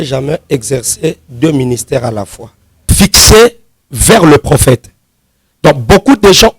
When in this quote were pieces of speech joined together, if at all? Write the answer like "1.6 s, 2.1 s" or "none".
2.9 s